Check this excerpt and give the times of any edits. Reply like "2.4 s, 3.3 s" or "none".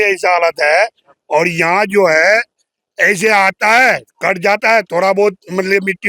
none